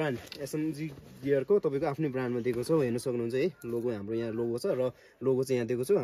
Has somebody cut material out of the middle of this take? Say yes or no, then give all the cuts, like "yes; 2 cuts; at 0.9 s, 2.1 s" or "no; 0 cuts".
no; 0 cuts